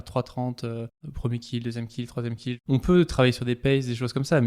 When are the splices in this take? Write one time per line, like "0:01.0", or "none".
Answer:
0:01.0
0:02.6

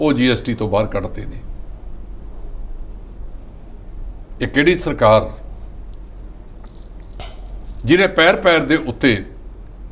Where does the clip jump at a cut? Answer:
none

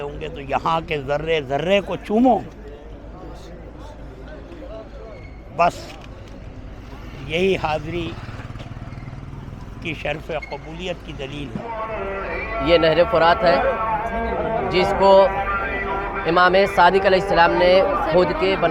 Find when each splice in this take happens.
0:11.8

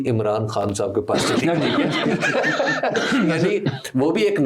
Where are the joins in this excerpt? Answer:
none

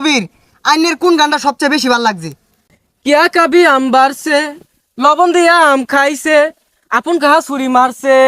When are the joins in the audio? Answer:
0:02.5

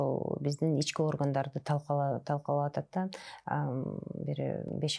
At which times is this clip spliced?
none

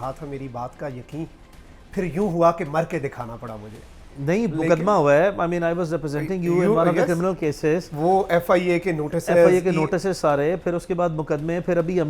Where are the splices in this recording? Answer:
none

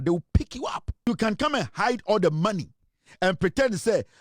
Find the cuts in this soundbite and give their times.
0:01.1

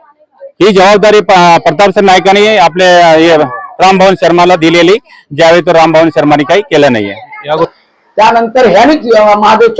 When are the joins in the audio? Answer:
0:07.7

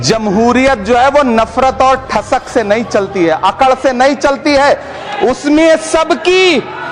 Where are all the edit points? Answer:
none

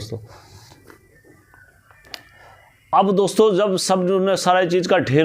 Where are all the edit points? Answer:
none

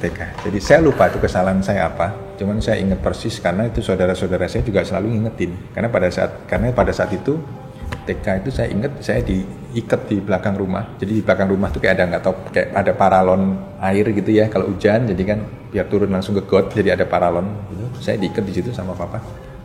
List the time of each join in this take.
0:02.3
0:05.6
0:10.9
0:13.7
0:15.6

